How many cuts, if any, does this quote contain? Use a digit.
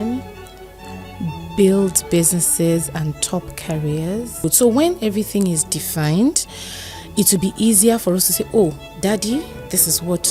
1